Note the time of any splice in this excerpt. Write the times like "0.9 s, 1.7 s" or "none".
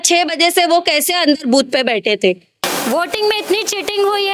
2.5 s